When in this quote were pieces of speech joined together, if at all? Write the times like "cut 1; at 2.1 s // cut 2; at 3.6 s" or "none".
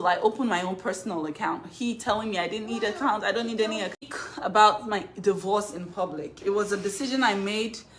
cut 1; at 4.0 s

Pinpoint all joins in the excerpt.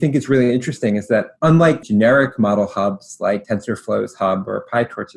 cut 1; at 1.8 s // cut 2; at 3.4 s

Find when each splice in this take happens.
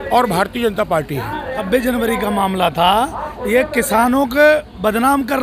cut 1; at 1.6 s

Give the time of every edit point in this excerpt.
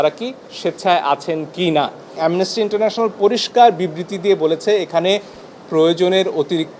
cut 1; at 2.2 s

